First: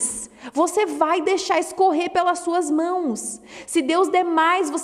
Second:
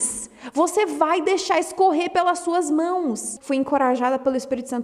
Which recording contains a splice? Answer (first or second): second